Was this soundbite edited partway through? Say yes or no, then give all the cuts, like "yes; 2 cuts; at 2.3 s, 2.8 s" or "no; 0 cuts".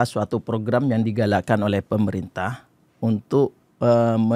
no; 0 cuts